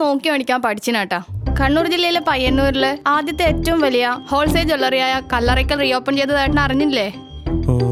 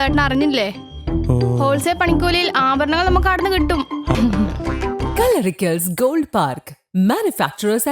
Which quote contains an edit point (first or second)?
second